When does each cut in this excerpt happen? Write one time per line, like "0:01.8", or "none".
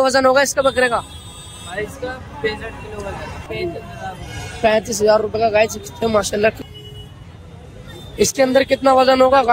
0:03.4
0:06.6